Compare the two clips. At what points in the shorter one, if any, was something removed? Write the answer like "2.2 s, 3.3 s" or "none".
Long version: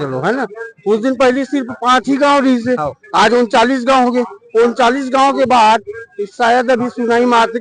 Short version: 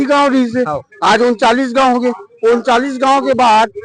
none